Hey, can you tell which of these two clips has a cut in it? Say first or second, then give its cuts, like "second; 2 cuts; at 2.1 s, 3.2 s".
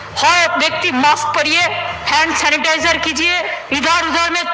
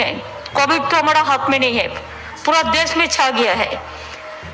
first; 2 cuts; at 2.0 s, 3.6 s